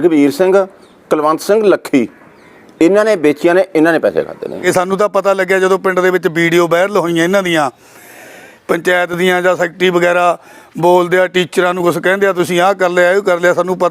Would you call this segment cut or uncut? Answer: cut